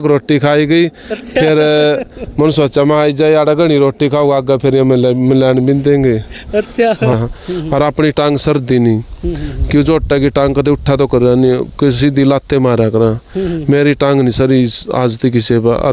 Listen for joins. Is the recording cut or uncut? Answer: cut